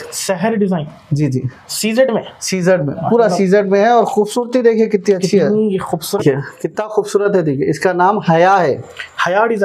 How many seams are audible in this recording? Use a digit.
1